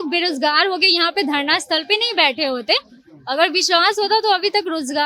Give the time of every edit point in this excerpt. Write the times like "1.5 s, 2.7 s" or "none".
none